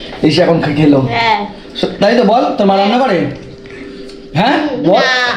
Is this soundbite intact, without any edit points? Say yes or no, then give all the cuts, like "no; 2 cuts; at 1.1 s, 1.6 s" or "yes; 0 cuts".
yes; 0 cuts